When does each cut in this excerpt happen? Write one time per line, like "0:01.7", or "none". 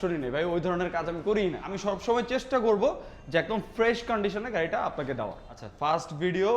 0:01.7
0:05.6